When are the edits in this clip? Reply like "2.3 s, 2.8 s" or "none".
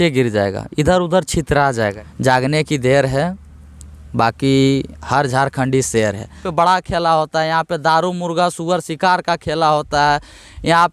2.0 s, 6.5 s